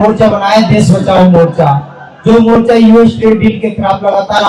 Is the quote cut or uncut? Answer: uncut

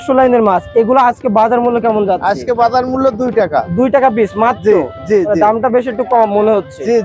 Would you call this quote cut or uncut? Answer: uncut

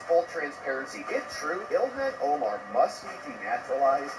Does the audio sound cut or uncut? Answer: uncut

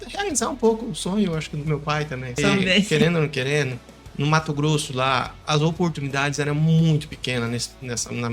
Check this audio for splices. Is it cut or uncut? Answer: cut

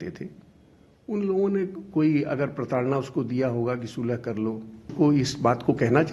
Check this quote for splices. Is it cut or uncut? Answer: cut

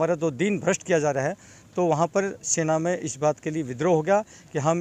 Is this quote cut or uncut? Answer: uncut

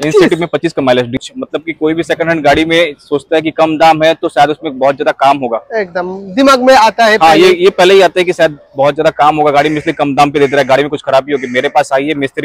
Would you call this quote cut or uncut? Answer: cut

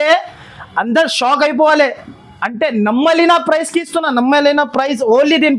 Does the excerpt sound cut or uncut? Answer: uncut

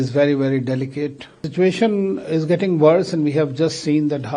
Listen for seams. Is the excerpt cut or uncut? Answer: cut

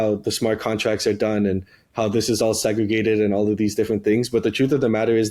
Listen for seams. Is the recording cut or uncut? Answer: uncut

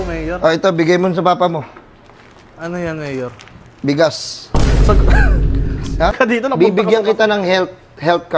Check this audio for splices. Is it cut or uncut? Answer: cut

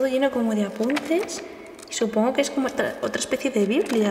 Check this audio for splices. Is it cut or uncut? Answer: uncut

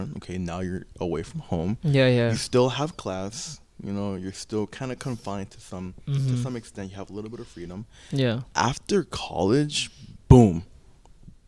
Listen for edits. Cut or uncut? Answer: uncut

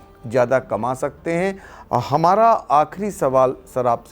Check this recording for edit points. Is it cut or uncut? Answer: uncut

